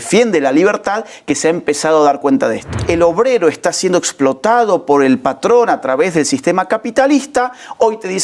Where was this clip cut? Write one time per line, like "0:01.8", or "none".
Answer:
0:02.8

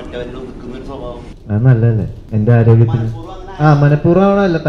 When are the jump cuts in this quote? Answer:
0:01.3
0:02.2

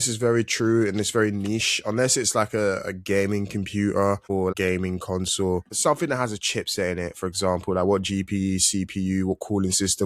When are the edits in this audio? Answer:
0:04.4
0:05.7

